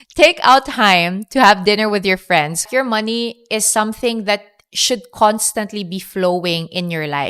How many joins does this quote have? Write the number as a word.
one